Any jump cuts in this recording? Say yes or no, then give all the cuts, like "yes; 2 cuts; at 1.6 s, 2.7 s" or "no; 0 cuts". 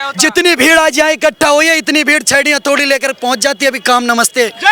no; 0 cuts